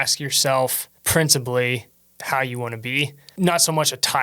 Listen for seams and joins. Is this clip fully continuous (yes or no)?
no